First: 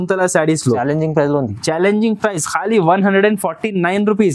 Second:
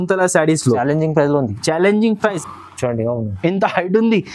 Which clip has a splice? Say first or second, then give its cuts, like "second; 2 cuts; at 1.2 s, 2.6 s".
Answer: second; 1 cut; at 2.5 s